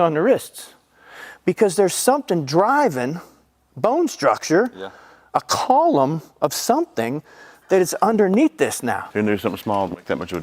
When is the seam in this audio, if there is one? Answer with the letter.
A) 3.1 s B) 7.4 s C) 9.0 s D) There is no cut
C